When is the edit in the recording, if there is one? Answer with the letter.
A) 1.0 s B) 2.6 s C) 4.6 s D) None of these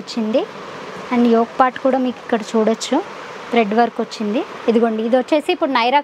C